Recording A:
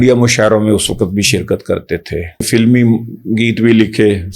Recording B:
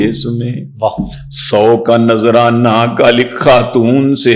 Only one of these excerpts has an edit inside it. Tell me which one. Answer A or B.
A